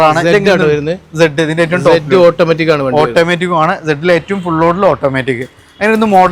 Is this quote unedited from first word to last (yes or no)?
yes